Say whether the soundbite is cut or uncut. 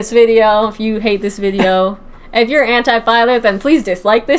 uncut